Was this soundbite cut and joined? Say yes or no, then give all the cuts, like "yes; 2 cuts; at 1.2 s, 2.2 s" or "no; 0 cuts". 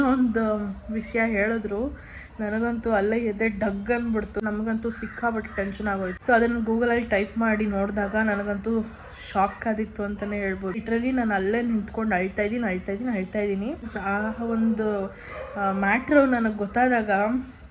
yes; 4 cuts; at 4.4 s, 6.1 s, 10.8 s, 13.9 s